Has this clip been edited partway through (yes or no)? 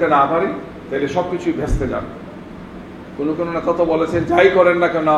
no